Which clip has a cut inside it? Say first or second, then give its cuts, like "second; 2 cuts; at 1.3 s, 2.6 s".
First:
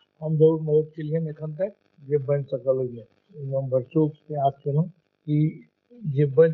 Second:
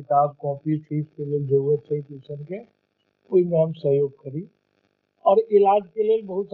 first; 2 cuts; at 1.9 s, 5.1 s